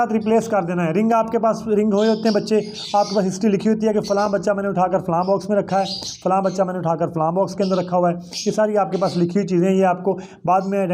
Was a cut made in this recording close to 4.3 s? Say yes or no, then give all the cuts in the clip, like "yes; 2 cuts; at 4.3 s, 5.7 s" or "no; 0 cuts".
no; 0 cuts